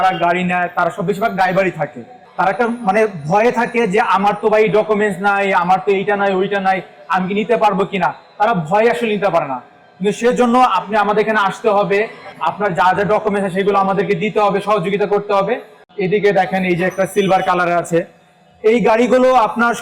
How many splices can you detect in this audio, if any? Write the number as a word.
one